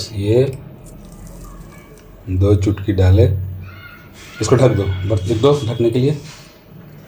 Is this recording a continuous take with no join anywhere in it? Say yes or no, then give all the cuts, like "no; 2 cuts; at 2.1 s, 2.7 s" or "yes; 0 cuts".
yes; 0 cuts